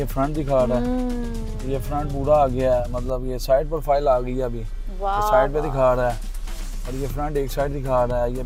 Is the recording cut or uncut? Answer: uncut